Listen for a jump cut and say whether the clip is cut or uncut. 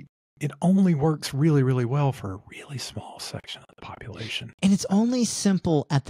uncut